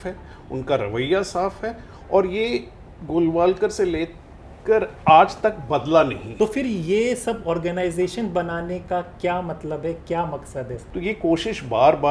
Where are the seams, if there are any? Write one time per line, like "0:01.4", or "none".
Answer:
0:06.2
0:10.8